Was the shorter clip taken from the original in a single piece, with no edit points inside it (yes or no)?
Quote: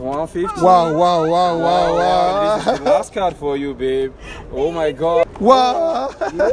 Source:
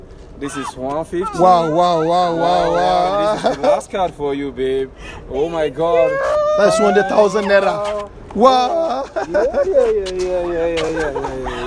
no